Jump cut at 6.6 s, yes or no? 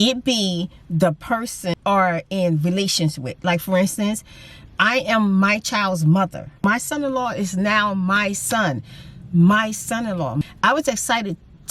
yes